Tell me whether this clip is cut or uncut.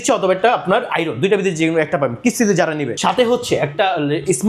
cut